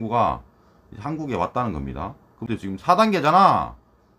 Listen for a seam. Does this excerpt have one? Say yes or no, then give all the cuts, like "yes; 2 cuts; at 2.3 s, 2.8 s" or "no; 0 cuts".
yes; 1 cut; at 2.5 s